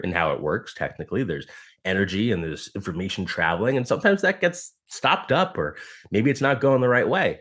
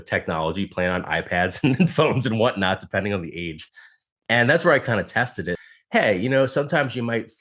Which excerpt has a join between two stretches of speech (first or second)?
second